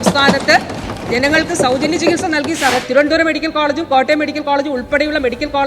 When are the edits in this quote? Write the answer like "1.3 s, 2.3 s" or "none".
2.9 s

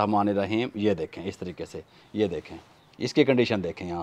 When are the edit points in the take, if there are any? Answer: none

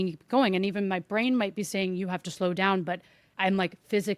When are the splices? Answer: none

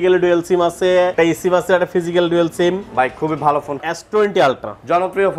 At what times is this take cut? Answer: 1.1 s, 3.8 s

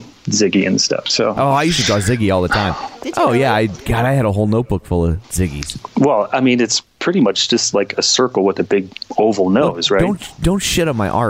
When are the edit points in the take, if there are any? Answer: 2.9 s, 5.2 s

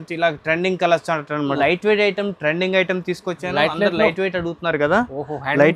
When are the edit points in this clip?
1.6 s

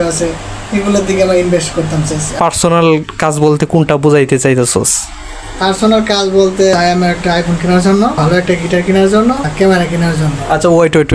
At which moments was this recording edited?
2.4 s, 6.7 s, 8.2 s, 9.5 s

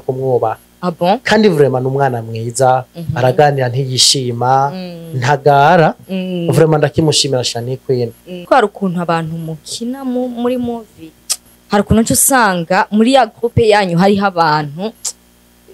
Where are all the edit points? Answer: 8.5 s

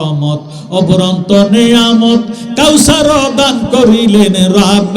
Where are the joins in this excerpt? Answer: none

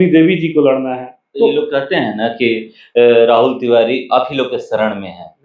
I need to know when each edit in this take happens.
none

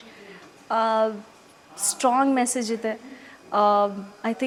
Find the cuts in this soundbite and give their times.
none

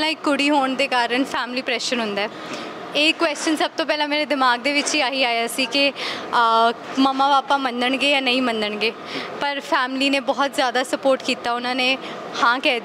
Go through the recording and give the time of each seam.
none

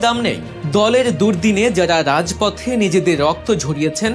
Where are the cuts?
none

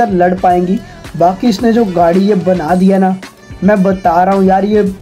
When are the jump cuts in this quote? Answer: 0.9 s

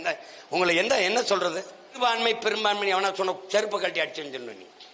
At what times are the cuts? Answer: 1.9 s

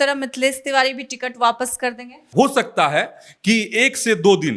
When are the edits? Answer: 2.2 s

